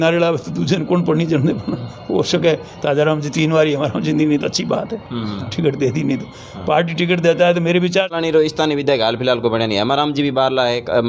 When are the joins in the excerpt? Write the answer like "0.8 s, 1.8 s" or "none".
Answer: 8.1 s